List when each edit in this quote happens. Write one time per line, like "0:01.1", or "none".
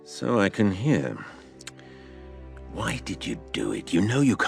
0:01.9